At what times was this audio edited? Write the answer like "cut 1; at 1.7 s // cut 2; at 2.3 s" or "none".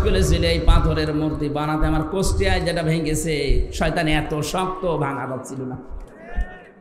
none